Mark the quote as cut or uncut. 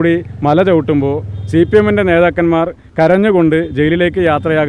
uncut